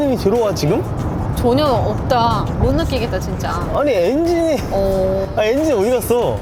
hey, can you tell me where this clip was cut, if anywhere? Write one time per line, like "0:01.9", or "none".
none

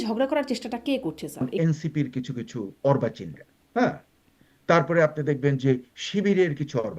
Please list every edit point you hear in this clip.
0:01.5

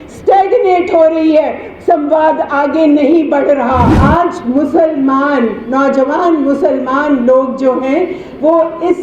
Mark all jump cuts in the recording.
0:03.9

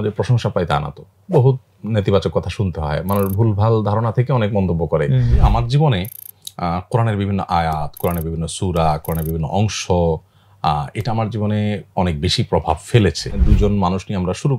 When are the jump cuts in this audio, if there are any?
0:05.4
0:13.3

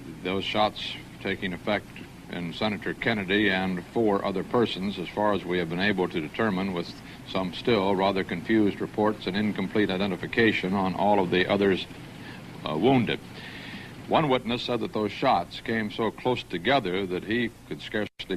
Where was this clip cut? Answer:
0:08.2

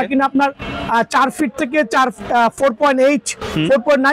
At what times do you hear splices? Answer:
none

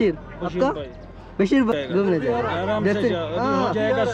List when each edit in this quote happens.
0:01.4

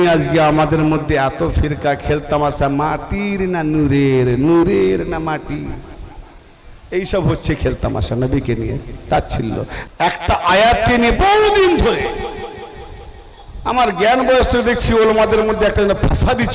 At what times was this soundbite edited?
0:09.8

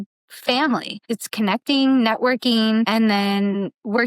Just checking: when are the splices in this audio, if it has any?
0:01.0
0:02.9

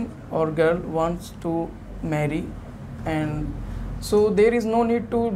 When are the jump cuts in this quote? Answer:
none

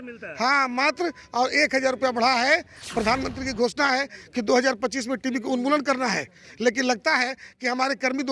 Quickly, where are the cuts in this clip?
0:02.7

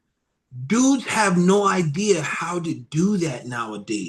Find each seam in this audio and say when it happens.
none

